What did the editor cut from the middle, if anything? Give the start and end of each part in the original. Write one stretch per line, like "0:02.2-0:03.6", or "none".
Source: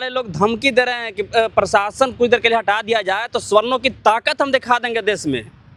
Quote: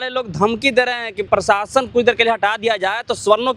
0:01.3-0:01.5